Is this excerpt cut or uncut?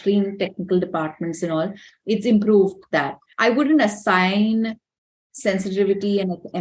cut